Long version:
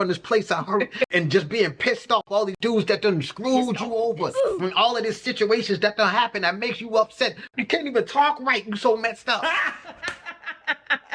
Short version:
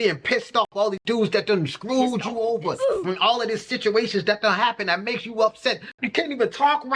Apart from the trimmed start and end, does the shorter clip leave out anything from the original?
no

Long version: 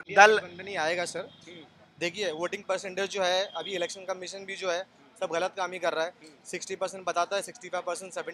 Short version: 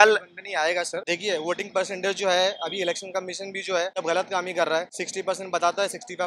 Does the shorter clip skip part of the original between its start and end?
yes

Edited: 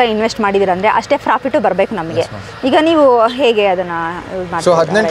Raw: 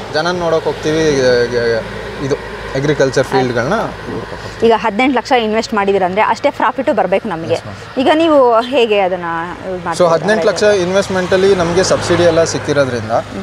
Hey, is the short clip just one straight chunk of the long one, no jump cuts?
yes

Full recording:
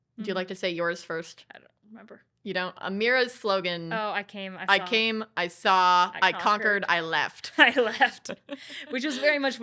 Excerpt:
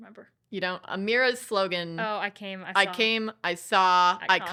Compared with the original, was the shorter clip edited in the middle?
no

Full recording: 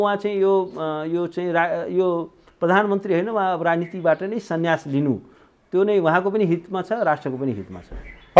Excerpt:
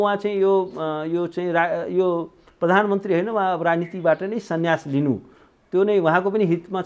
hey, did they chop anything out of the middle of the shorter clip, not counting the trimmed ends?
no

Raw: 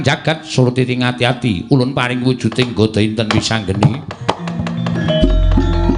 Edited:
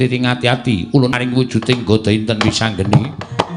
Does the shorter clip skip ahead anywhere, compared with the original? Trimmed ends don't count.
yes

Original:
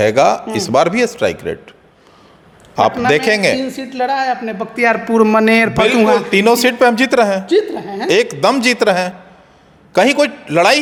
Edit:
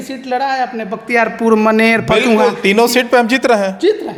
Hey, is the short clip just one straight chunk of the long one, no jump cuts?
yes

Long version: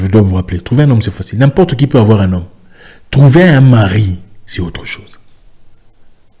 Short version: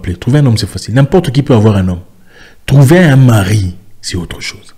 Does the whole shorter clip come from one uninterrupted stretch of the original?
yes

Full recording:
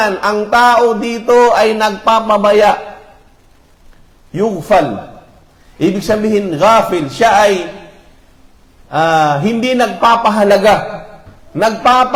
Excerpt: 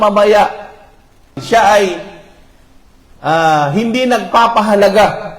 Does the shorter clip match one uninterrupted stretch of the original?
no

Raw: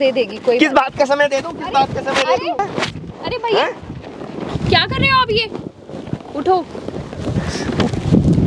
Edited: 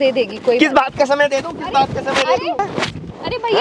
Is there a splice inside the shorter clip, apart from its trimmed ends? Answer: no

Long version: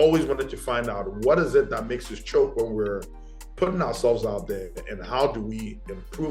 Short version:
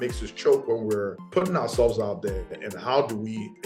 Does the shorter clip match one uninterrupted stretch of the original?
no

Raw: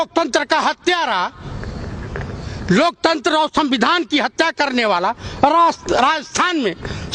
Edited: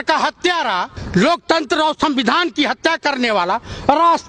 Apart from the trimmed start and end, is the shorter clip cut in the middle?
yes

